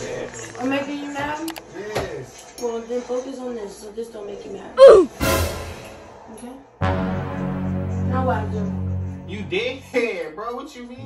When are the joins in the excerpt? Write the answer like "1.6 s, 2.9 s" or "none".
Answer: none